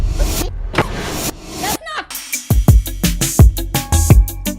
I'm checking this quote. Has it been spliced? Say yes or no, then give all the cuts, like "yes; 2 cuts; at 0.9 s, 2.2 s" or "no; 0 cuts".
yes; 1 cut; at 2.3 s